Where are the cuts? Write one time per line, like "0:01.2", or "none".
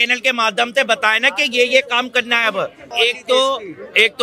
0:02.9

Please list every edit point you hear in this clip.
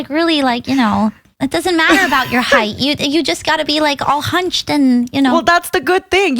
0:01.3

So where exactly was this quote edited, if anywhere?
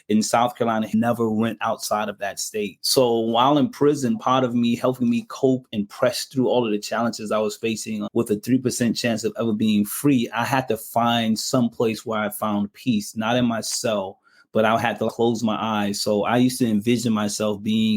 0:00.9
0:02.8
0:05.7
0:08.0
0:15.1

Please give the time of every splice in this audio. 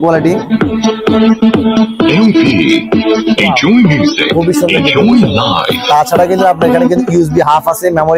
none

